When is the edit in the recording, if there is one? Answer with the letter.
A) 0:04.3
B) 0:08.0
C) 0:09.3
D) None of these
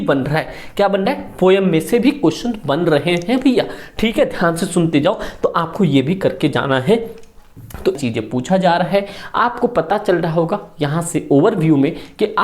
B